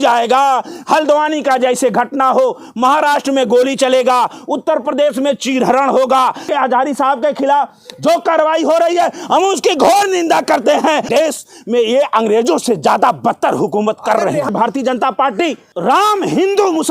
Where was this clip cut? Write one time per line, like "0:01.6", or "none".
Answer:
0:06.4
0:11.1
0:14.5
0:15.7